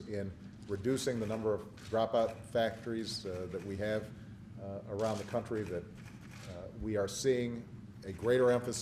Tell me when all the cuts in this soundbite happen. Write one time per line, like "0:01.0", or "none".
none